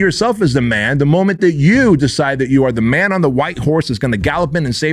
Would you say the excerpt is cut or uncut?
uncut